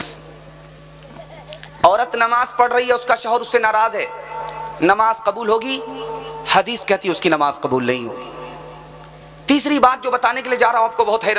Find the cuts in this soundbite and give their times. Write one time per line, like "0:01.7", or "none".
none